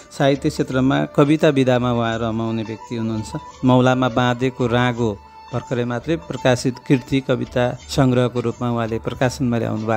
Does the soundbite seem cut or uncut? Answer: cut